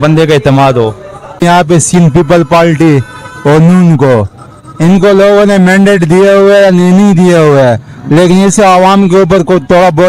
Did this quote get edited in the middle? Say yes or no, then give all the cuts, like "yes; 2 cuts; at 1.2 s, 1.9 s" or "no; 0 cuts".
yes; 1 cut; at 1.4 s